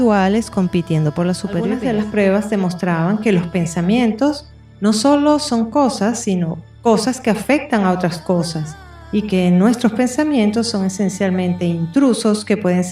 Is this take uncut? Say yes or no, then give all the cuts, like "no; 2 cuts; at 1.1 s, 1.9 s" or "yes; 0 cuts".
no; 1 cut; at 1.8 s